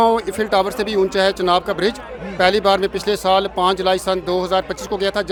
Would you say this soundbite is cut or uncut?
uncut